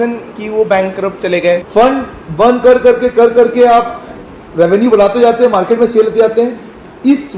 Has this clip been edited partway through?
yes; 1 cut; at 1.7 s

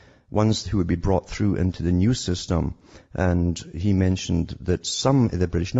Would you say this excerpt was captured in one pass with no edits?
yes; 0 cuts

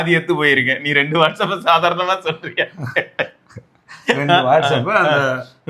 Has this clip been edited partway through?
no; 0 cuts

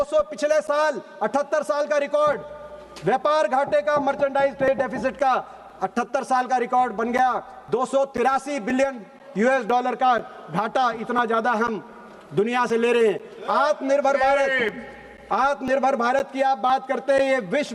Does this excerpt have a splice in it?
no; 0 cuts

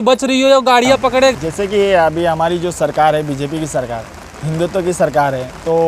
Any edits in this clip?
yes; 1 cut; at 1.3 s

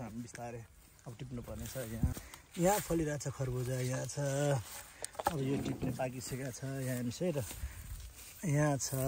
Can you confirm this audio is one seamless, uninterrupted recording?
no; 1 cut; at 2.1 s

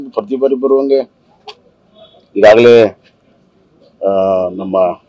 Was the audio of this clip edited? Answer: no; 0 cuts

